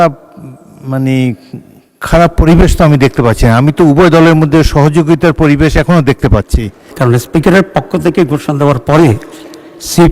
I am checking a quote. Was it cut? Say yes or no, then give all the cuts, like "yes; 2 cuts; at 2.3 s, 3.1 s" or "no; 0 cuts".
yes; 1 cut; at 6.9 s